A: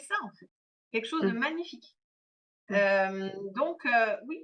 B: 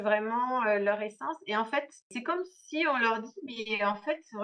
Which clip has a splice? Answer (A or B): B